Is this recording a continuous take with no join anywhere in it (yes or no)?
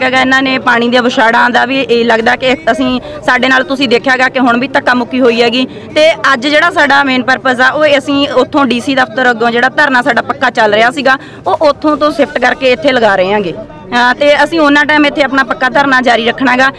yes